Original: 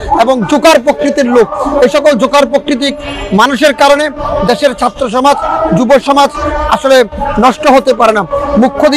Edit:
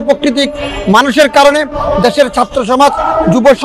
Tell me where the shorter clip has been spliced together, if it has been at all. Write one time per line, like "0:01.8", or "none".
none